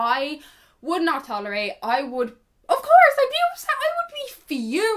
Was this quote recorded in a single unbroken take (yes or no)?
yes